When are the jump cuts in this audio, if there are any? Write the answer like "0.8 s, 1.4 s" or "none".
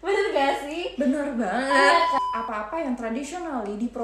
2.2 s